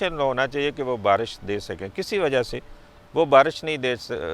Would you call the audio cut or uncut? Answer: uncut